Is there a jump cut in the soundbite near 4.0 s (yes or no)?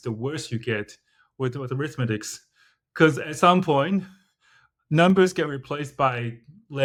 no